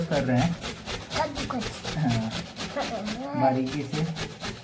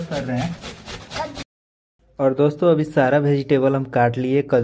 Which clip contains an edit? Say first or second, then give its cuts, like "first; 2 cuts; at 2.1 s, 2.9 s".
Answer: second; 1 cut; at 1.4 s